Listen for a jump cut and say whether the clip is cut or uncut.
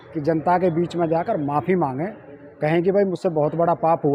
uncut